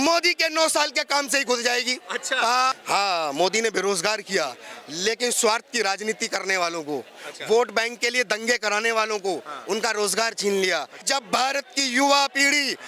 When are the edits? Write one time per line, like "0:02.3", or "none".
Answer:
0:02.8
0:11.0